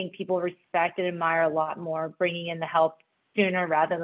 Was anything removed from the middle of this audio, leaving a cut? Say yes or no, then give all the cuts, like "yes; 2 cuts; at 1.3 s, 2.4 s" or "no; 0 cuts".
no; 0 cuts